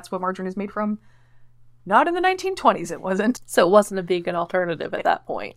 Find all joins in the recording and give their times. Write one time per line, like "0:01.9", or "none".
0:03.4